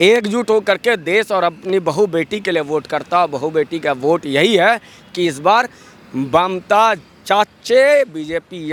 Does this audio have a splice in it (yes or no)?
no